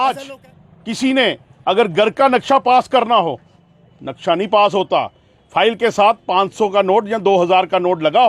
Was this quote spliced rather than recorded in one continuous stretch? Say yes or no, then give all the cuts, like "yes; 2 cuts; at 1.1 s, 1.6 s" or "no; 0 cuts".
no; 0 cuts